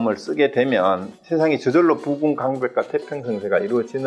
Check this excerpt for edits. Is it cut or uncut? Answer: uncut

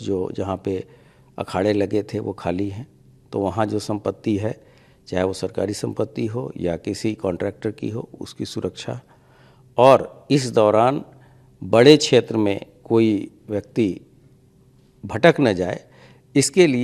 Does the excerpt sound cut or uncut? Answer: uncut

